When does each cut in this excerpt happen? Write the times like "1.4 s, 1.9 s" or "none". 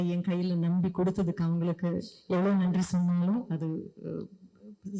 none